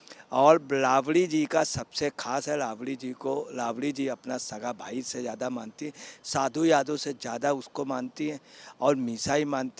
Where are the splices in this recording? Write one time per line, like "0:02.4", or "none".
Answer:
none